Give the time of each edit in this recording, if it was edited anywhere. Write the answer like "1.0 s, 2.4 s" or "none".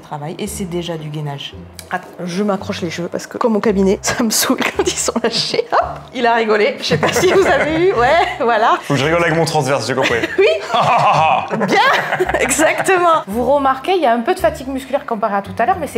1.8 s, 4.1 s, 13.2 s